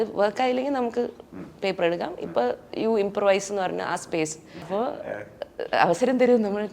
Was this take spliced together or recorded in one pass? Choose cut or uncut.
cut